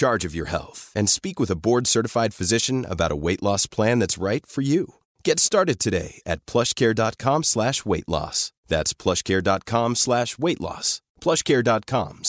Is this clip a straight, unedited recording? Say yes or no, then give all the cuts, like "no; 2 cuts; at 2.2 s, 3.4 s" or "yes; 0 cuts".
yes; 0 cuts